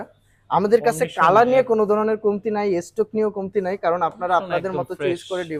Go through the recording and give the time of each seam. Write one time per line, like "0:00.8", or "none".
none